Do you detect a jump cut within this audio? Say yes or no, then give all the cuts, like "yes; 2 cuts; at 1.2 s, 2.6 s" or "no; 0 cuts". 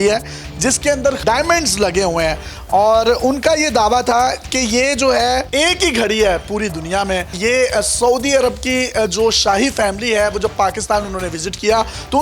yes; 2 cuts; at 1.2 s, 5.5 s